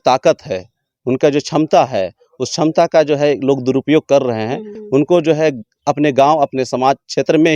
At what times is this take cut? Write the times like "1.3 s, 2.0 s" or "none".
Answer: 4.7 s